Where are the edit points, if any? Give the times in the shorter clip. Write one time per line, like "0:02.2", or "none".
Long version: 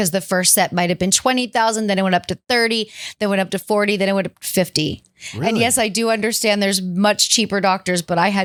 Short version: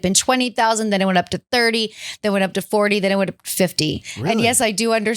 0:04.1